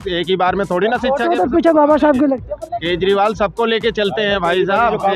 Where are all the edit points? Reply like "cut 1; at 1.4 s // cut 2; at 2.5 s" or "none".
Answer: none

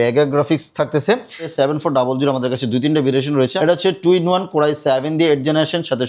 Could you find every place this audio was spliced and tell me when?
cut 1; at 1.5 s // cut 2; at 3.5 s

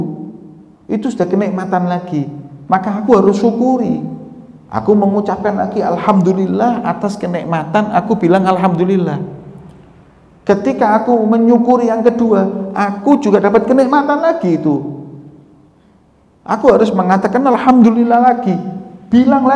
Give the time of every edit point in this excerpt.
none

